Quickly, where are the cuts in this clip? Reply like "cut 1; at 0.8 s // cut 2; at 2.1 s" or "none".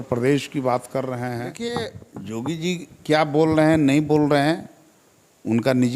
cut 1; at 1.5 s

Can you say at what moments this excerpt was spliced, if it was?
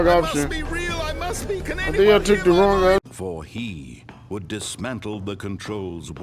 cut 1; at 3.1 s

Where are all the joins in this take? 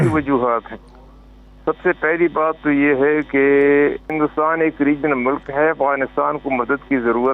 cut 1; at 4.1 s

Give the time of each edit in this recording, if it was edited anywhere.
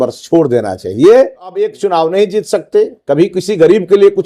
cut 1; at 1.7 s

